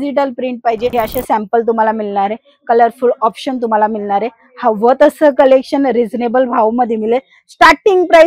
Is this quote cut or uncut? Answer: cut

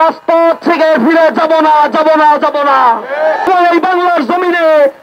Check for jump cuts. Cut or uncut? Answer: cut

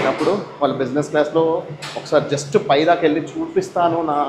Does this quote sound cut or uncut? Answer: uncut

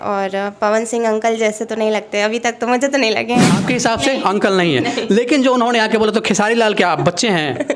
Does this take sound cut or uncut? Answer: cut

